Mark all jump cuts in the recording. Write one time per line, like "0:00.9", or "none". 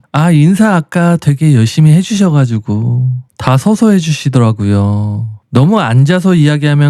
none